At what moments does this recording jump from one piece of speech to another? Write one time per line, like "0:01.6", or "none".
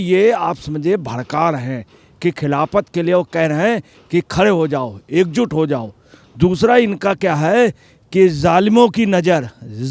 none